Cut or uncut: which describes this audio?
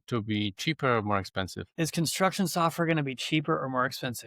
cut